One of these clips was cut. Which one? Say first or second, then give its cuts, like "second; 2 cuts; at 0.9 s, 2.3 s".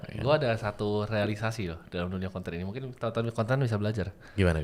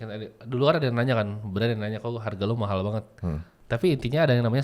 second; 1 cut; at 3.5 s